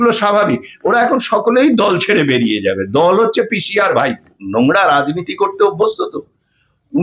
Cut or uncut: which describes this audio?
cut